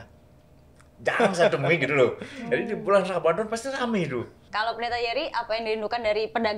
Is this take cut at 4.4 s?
yes; 1 cut; at 4.4 s

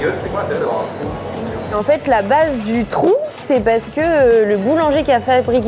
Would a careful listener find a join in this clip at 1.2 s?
no; 0 cuts

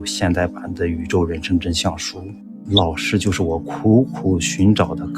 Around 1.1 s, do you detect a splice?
no; 1 cut; at 2.6 s

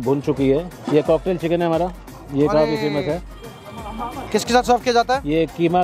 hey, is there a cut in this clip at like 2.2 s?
no; 2 cuts; at 0.8 s, 4.2 s

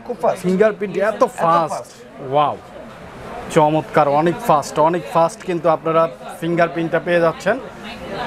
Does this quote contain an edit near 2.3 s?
no; 0 cuts

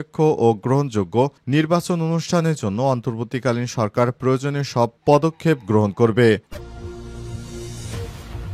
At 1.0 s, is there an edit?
no; 1 cut; at 6.5 s

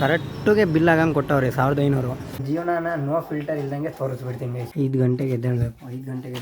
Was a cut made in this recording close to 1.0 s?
no; 2 cuts; at 2.4 s, 4.6 s

